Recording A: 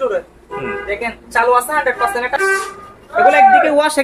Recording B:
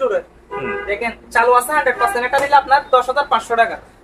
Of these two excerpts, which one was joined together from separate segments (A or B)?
A